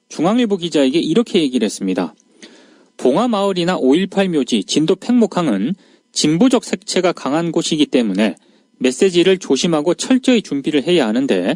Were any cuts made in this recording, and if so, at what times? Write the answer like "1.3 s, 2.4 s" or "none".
7.5 s